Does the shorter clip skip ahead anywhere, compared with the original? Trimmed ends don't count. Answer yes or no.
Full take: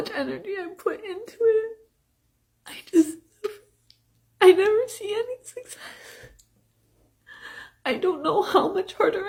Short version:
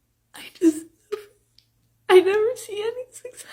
no